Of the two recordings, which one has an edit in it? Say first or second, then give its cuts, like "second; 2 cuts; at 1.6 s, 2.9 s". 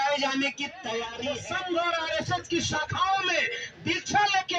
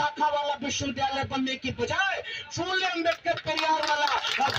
first; 1 cut; at 1.2 s